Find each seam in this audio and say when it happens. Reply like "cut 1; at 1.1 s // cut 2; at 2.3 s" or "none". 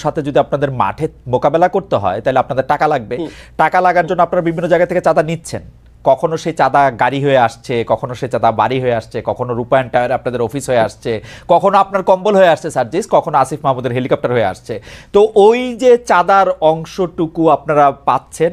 none